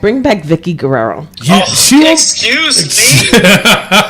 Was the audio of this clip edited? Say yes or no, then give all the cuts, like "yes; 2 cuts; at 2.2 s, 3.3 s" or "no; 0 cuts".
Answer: yes; 1 cut; at 1.3 s